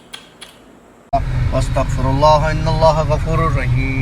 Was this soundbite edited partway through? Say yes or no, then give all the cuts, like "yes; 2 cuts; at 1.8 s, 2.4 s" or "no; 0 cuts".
yes; 1 cut; at 1.0 s